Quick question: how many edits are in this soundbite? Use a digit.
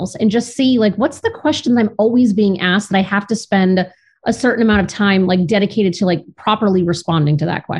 0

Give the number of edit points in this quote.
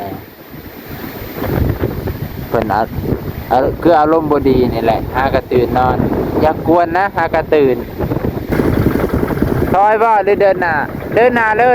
1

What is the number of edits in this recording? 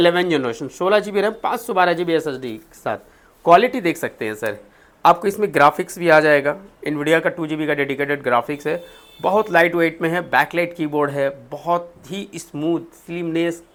0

